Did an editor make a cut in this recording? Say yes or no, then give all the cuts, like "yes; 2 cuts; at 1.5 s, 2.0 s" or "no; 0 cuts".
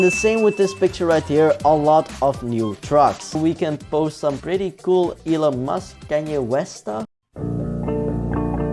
yes; 1 cut; at 3.4 s